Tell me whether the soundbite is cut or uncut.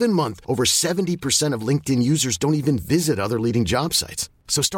uncut